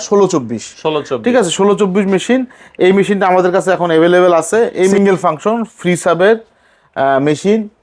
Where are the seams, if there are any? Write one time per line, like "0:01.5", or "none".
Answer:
0:04.9

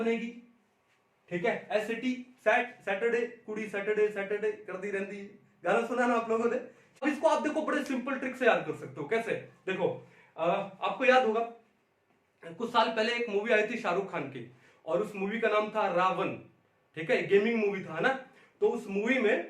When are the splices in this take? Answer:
0:07.0

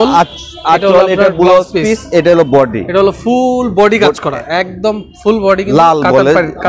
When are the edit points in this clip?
none

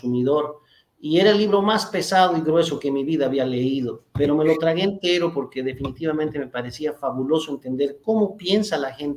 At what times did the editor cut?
none

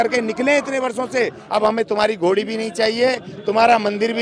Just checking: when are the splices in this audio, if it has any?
0:01.4

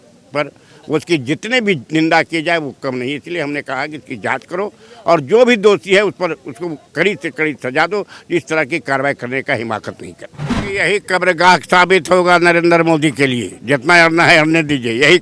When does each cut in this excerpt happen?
0:10.6

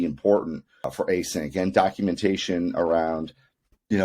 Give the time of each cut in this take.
0:00.9

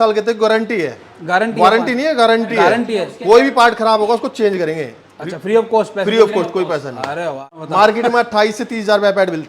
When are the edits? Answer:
0:07.6

